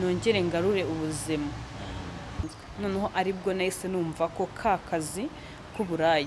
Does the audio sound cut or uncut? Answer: cut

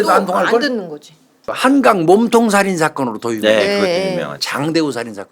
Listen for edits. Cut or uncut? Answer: cut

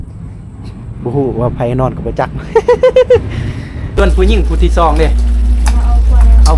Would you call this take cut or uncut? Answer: cut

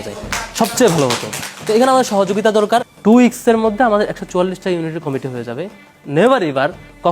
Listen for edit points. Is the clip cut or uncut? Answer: cut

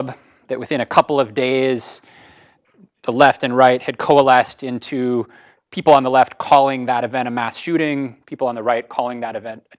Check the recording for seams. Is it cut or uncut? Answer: cut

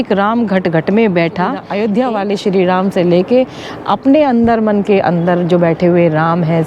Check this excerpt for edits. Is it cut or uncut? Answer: cut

